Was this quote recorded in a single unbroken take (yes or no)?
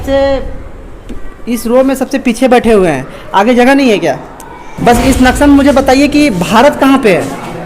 no